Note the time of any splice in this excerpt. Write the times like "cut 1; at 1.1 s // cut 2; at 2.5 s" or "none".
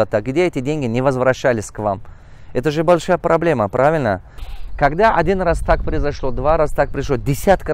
cut 1; at 4.3 s